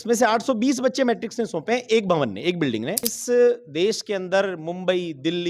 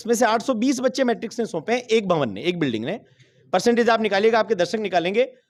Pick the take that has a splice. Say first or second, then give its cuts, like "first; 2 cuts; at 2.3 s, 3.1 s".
first; 1 cut; at 3.1 s